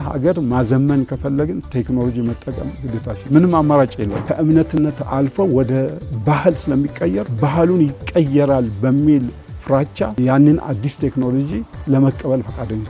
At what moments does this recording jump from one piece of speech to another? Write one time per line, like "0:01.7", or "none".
0:04.2
0:07.3
0:10.2